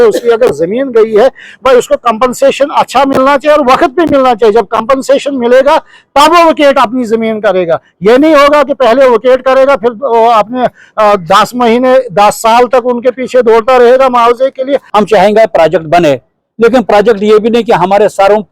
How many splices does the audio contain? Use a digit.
1